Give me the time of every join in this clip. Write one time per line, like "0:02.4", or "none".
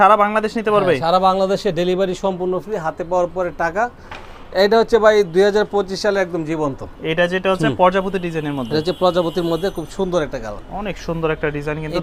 none